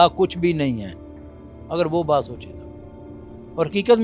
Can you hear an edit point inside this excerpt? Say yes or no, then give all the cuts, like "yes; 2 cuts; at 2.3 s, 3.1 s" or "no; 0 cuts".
no; 0 cuts